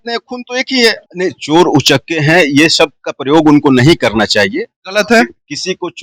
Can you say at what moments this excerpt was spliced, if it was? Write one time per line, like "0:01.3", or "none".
0:01.0